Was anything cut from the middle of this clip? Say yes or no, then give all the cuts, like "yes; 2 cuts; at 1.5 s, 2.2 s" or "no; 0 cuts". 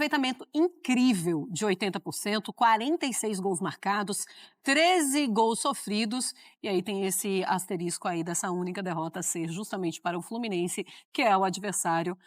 no; 0 cuts